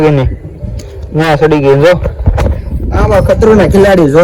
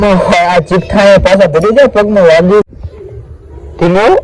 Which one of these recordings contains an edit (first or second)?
second